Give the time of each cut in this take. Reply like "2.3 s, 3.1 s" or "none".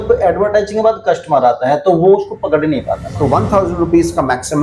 3.1 s